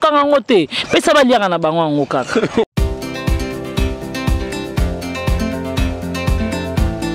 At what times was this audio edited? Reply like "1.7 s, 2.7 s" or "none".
2.6 s